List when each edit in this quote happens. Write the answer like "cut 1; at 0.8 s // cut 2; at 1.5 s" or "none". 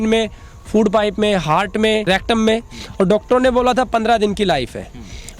cut 1; at 2.1 s